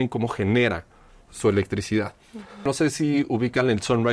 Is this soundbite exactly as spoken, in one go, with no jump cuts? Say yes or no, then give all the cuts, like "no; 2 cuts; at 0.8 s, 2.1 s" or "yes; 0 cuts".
no; 1 cut; at 2.7 s